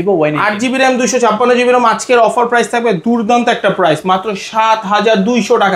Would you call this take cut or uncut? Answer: uncut